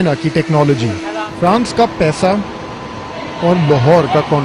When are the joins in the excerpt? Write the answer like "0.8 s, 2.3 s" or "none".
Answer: 1.3 s